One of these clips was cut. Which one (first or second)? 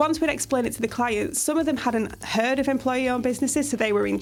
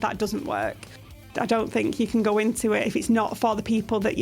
second